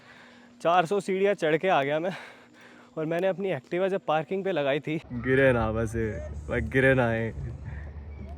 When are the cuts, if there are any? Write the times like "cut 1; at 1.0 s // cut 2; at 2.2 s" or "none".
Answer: cut 1; at 5.1 s